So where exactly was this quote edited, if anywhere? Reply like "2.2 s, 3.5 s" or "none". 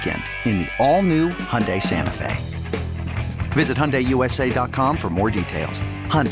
none